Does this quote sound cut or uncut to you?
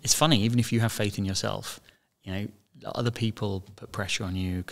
uncut